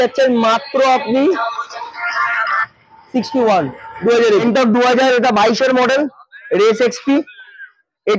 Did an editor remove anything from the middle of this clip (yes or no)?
yes